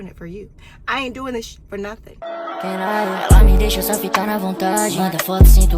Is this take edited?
yes; 1 cut; at 2.1 s

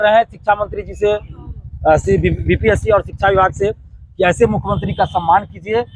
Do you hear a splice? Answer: no; 0 cuts

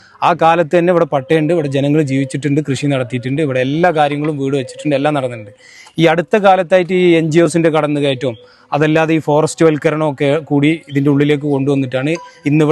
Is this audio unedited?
yes; 0 cuts

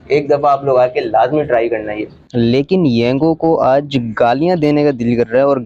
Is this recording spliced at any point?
yes; 1 cut; at 2.2 s

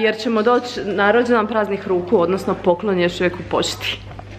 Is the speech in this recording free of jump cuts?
yes; 0 cuts

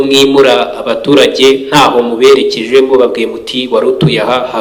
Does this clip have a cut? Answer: no; 0 cuts

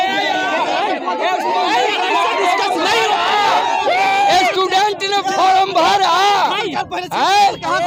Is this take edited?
no; 0 cuts

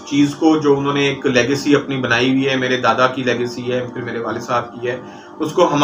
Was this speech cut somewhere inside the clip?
no; 0 cuts

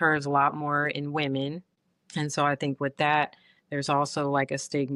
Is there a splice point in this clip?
no; 0 cuts

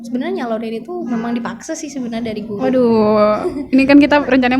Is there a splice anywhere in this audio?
no; 0 cuts

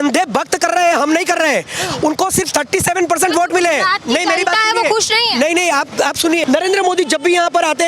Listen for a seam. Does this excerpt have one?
yes; 1 cut; at 6.4 s

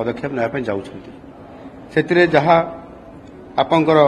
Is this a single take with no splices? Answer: yes; 0 cuts

